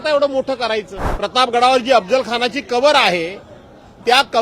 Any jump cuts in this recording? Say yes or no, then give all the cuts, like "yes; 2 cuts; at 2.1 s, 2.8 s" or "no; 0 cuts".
yes; 1 cut; at 1.0 s